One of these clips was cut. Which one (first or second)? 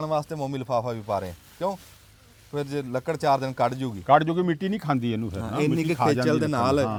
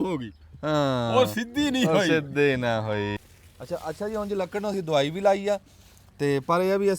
second